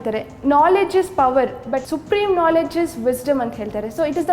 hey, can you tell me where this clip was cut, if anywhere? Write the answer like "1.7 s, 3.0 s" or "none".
1.9 s